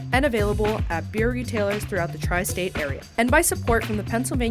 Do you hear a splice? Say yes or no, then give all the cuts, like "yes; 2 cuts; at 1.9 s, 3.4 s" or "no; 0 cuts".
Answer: yes; 1 cut; at 3.0 s